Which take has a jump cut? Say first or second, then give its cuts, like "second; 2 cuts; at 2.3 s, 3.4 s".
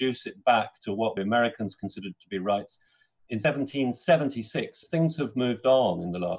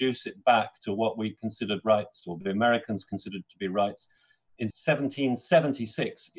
first; 3 cuts; at 1.1 s, 3.4 s, 4.8 s